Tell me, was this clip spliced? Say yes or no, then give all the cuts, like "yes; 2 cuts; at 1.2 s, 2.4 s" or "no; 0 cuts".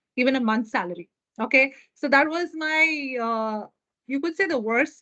no; 0 cuts